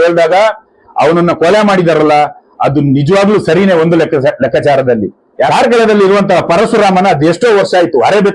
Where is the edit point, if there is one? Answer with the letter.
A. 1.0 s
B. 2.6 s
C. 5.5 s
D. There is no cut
C